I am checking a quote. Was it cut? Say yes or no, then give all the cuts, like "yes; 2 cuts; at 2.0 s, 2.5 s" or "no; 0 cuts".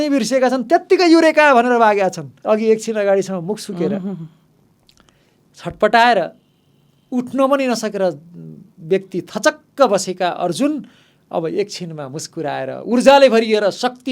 yes; 1 cut; at 2.3 s